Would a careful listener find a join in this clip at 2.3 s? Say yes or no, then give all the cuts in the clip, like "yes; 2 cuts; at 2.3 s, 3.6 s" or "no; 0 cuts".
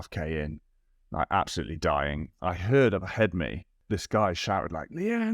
yes; 2 cuts; at 2.3 s, 3.8 s